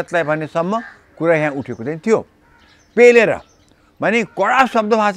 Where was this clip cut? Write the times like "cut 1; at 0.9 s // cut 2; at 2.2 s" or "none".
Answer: none